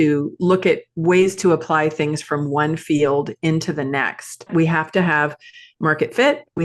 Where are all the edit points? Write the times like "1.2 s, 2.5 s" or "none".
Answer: 4.5 s